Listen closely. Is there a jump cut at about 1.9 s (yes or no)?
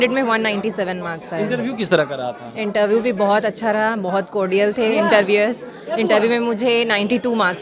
no